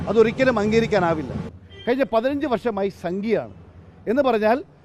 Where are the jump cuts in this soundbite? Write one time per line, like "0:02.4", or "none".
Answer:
0:01.3